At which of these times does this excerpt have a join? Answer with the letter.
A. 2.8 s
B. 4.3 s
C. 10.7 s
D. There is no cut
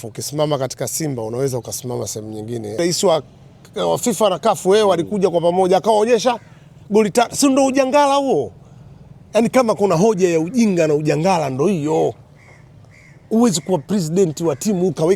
A